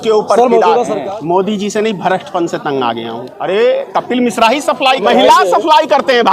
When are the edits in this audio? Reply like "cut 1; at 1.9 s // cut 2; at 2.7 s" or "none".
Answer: cut 1; at 1.0 s // cut 2; at 3.3 s // cut 3; at 5.0 s